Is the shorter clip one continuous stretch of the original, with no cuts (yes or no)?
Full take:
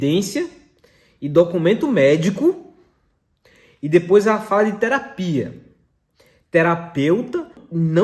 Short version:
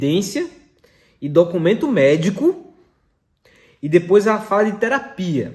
yes